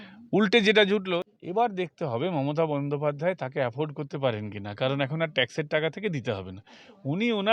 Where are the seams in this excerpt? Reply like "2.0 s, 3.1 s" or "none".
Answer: 1.3 s